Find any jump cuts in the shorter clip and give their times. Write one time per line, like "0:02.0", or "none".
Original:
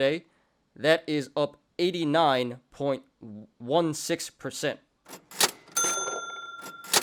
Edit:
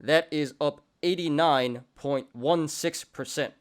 0:02.3